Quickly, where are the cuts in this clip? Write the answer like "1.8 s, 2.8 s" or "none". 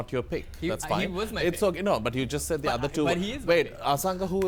none